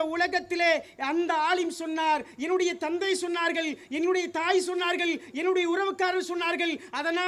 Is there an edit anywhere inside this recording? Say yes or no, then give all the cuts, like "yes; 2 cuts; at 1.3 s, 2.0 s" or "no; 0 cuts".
no; 0 cuts